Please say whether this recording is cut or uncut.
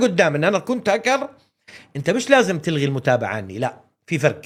uncut